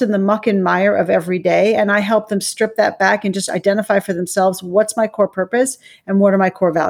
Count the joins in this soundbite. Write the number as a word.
zero